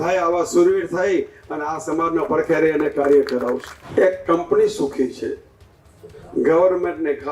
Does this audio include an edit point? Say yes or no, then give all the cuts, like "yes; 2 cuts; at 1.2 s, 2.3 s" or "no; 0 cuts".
yes; 1 cut; at 3.7 s